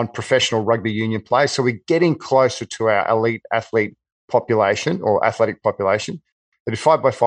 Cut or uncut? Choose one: uncut